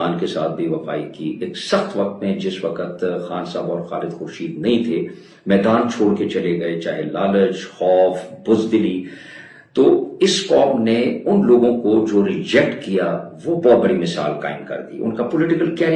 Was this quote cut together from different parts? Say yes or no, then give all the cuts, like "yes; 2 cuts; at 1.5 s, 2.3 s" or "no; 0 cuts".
no; 0 cuts